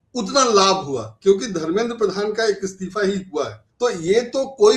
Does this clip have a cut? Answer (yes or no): yes